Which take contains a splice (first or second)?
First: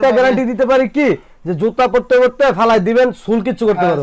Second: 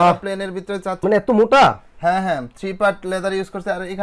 second